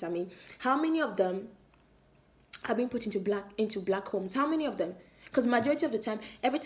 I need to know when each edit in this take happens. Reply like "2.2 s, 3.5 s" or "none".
none